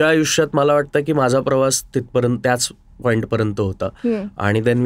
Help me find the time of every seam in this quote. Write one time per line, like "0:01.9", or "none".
none